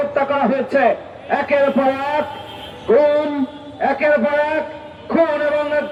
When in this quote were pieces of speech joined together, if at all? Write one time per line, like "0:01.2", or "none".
none